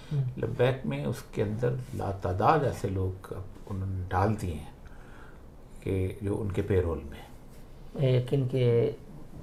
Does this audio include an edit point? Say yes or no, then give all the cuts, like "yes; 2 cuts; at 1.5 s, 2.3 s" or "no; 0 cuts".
no; 0 cuts